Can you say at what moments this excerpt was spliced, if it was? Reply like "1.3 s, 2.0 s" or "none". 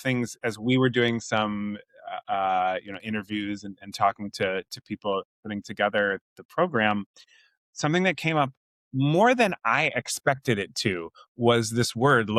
none